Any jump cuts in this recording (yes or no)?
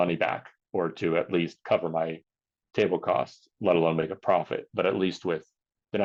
no